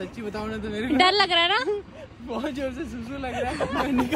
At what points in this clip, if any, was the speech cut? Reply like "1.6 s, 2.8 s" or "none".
none